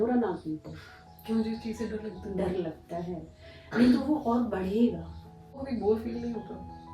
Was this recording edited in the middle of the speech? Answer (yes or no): yes